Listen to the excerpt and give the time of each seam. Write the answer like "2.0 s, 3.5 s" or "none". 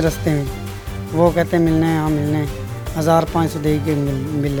none